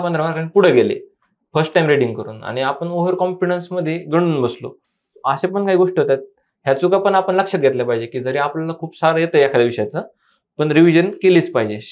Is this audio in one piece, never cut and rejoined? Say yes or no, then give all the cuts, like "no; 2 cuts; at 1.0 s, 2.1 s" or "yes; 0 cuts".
yes; 0 cuts